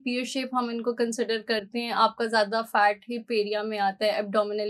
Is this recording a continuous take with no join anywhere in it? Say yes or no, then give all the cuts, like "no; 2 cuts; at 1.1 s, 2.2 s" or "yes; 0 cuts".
yes; 0 cuts